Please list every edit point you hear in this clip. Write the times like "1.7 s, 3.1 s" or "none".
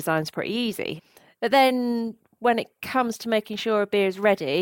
0.9 s